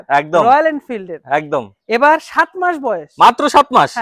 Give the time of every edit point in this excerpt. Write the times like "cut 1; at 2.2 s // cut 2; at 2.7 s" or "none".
none